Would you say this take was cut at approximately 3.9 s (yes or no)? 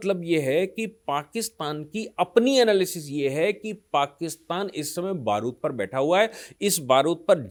no